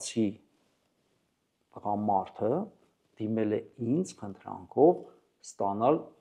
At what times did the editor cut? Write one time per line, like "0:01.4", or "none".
none